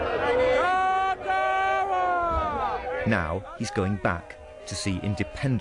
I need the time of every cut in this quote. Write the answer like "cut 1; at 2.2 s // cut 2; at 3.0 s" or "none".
cut 1; at 3.0 s